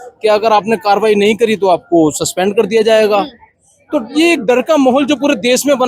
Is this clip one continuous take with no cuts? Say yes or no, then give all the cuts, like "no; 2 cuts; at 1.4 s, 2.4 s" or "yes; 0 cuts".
yes; 0 cuts